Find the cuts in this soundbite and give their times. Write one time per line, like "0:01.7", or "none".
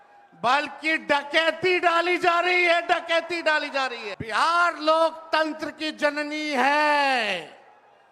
0:04.1